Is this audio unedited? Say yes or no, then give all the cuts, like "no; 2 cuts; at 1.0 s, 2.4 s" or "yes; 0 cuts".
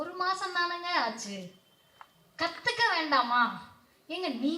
yes; 0 cuts